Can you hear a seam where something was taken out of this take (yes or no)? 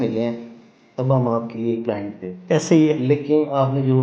no